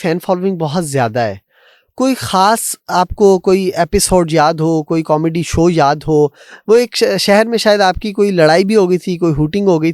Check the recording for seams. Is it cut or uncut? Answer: uncut